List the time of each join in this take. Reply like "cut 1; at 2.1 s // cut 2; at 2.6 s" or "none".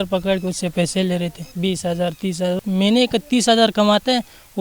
cut 1; at 1.4 s // cut 2; at 2.6 s